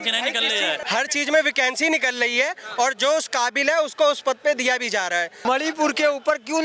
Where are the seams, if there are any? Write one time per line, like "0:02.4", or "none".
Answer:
0:00.8
0:05.4